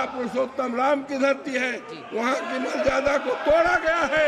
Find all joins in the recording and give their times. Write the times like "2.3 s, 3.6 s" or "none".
none